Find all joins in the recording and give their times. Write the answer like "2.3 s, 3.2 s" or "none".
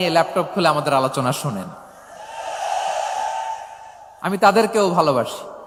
none